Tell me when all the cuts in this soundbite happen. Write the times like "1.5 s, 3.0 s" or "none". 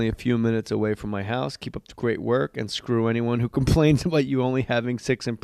2.6 s